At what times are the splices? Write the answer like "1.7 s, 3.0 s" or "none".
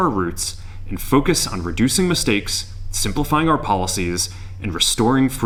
none

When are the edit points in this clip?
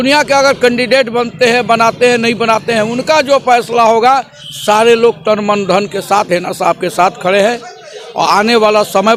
none

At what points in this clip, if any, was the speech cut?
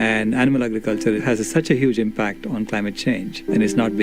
none

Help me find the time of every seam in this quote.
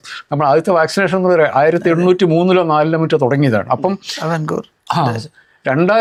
none

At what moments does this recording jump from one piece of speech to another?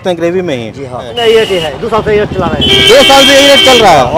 1.2 s

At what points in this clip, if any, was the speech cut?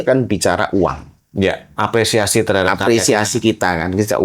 1.7 s

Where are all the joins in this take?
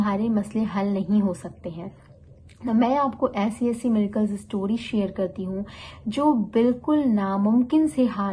none

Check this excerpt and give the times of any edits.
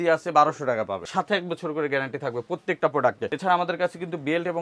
1.0 s, 3.3 s

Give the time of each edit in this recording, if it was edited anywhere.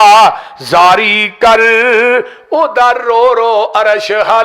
none

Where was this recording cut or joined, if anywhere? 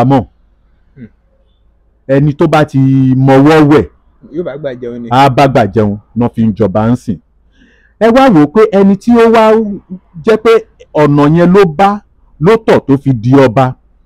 none

